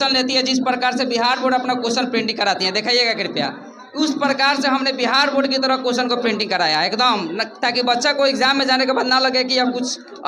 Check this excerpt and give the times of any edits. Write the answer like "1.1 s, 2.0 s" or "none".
none